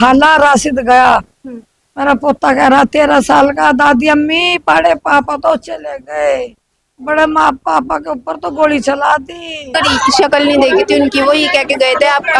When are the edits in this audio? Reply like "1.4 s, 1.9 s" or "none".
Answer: 9.6 s